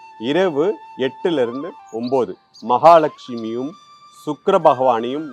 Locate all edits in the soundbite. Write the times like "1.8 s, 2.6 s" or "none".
2.4 s